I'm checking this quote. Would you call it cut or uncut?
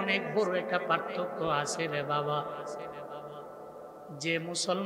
uncut